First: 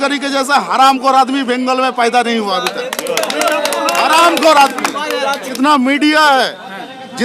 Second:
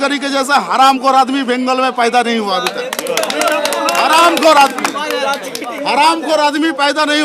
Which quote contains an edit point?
first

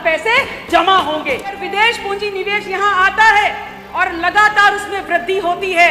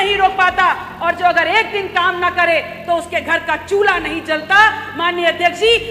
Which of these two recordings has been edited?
first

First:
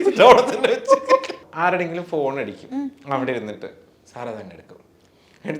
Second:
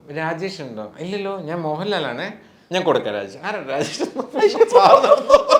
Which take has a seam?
first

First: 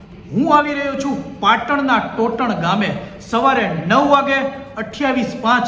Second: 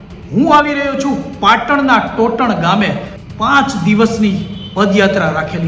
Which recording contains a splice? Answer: second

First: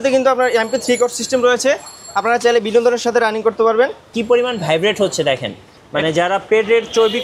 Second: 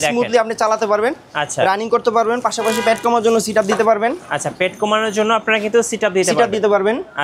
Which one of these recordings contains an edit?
first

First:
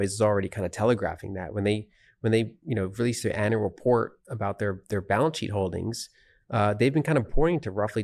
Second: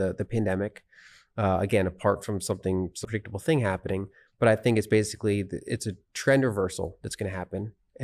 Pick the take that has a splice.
second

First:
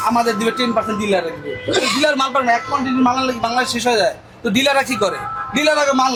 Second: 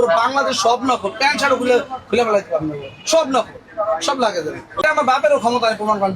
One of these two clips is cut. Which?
second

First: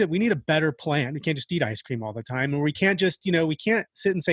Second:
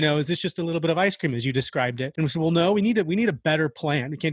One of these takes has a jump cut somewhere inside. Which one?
second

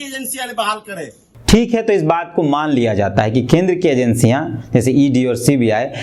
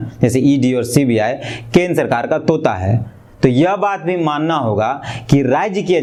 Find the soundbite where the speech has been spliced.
first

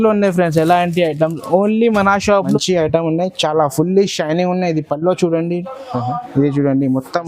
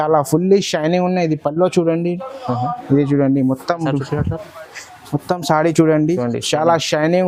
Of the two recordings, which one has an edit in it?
first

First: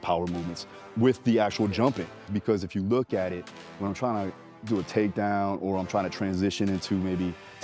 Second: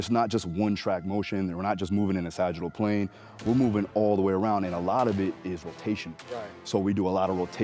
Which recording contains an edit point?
first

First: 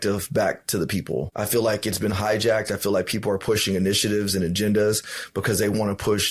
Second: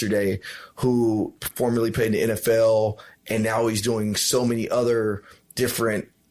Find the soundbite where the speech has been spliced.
first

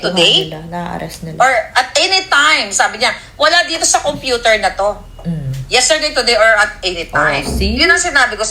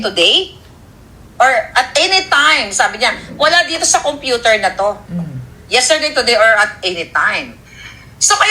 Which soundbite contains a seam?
second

